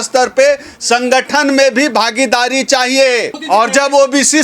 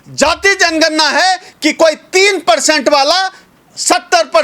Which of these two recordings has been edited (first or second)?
first